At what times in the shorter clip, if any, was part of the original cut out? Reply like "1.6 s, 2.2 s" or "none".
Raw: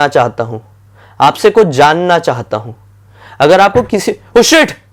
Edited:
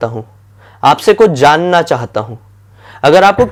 none